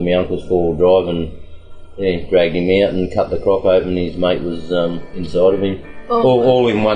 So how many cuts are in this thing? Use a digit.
1